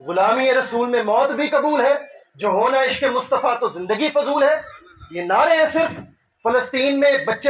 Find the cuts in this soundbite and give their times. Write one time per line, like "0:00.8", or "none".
none